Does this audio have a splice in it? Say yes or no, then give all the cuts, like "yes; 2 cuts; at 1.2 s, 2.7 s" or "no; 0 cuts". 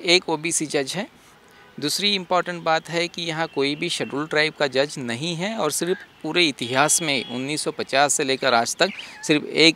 no; 0 cuts